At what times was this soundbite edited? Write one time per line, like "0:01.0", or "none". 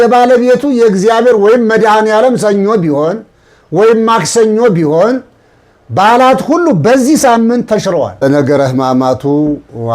0:08.2